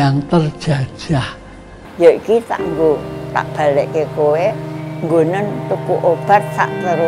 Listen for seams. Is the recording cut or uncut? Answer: cut